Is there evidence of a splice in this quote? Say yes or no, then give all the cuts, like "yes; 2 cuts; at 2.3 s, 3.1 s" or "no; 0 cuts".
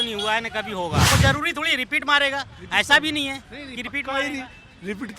yes; 1 cut; at 1.1 s